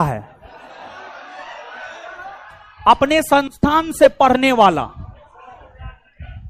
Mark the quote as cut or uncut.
uncut